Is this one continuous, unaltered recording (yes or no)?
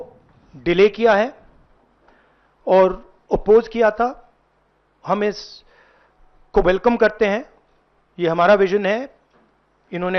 yes